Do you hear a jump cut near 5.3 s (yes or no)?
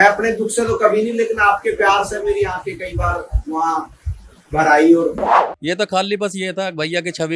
yes